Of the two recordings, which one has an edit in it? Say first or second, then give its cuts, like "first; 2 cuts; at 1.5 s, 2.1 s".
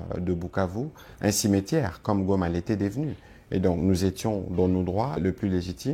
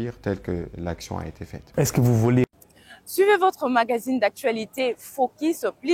second; 1 cut; at 2.4 s